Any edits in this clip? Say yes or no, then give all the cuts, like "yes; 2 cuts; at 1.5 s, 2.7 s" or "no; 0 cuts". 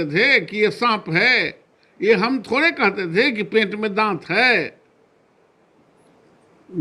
no; 0 cuts